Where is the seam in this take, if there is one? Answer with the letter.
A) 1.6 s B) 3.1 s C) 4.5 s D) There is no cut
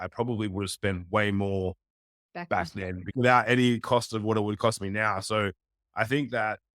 B